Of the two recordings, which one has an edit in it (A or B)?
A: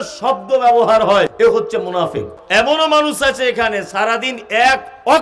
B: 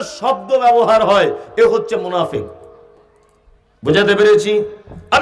A